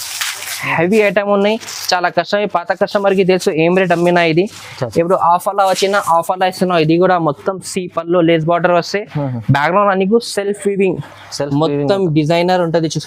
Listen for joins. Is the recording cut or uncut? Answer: uncut